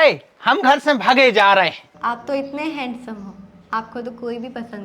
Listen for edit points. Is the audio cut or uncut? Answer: cut